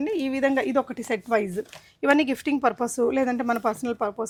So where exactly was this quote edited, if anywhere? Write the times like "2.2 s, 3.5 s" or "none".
none